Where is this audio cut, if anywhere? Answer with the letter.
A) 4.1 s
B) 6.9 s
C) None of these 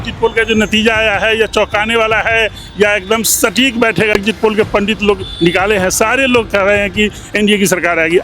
A